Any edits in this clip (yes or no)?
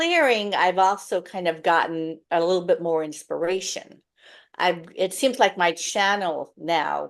no